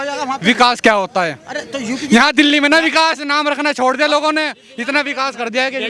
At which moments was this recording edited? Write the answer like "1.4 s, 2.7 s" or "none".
none